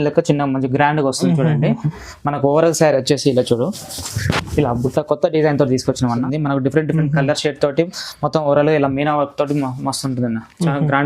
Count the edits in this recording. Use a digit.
1